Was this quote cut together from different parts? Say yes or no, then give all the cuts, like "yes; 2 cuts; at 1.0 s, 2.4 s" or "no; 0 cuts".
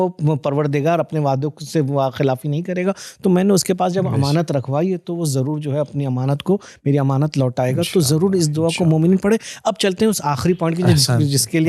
no; 0 cuts